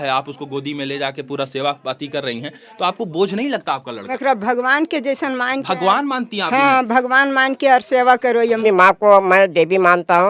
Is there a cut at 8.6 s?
yes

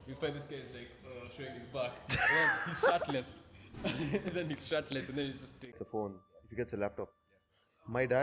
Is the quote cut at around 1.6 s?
no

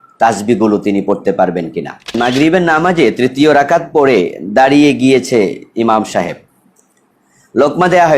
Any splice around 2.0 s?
yes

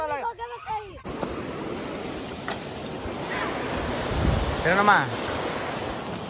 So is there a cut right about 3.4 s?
no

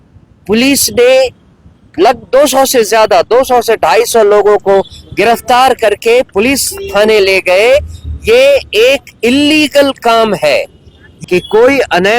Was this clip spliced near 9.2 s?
no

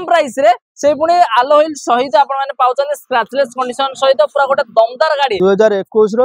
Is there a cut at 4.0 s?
no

